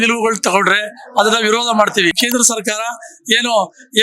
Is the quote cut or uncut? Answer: cut